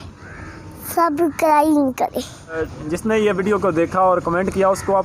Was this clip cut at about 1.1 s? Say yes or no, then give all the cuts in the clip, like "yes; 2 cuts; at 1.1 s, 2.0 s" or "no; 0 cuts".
no; 1 cut; at 2.6 s